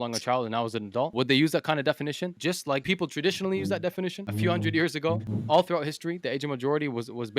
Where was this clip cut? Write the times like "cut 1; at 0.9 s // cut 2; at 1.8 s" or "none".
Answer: cut 1; at 1.1 s // cut 2; at 2.8 s // cut 3; at 4.2 s // cut 4; at 5.3 s